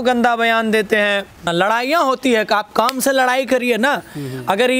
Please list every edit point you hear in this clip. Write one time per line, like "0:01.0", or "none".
0:01.5